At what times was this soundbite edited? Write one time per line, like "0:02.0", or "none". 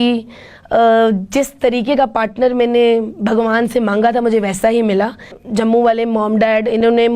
0:05.4